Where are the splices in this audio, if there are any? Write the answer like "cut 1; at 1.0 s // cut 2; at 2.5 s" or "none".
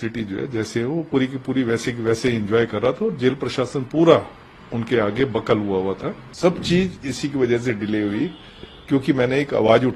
cut 1; at 6.2 s